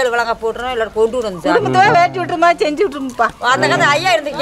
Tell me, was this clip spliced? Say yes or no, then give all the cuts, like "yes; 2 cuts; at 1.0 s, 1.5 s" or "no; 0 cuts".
no; 0 cuts